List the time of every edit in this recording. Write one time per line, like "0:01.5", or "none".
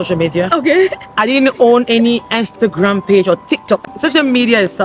0:03.8